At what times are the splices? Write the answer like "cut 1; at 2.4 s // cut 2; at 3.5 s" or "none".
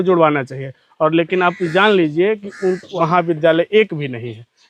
cut 1; at 2.9 s